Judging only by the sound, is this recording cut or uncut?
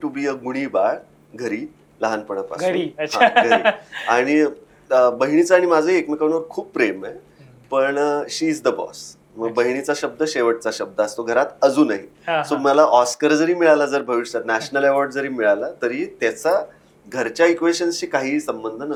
uncut